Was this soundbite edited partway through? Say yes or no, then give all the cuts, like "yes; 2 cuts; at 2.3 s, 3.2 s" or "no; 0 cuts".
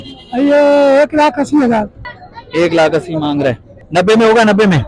yes; 2 cuts; at 1.9 s, 3.7 s